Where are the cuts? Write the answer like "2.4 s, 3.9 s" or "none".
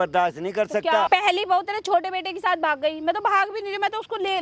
1.1 s